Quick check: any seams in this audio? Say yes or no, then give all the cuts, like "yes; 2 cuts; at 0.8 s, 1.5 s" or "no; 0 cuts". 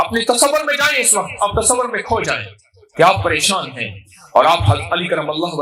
no; 0 cuts